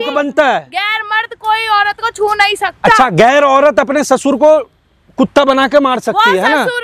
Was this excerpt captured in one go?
yes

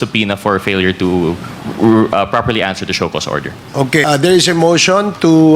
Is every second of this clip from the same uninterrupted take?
no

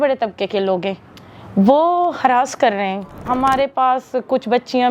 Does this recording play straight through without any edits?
no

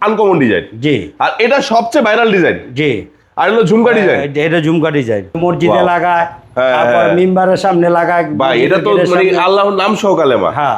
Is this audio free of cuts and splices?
no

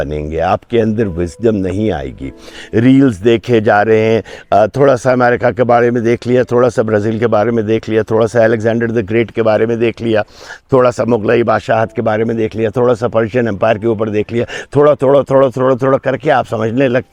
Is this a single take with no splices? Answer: yes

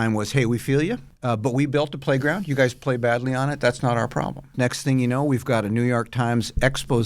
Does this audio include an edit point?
yes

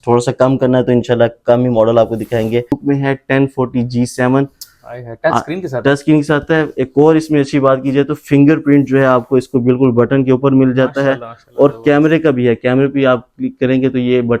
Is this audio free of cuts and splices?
no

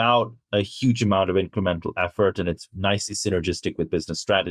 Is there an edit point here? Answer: no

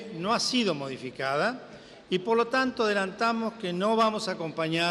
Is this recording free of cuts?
no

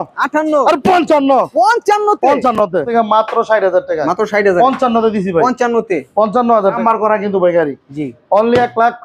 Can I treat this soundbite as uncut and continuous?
no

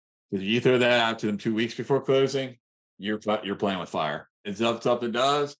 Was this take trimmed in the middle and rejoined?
yes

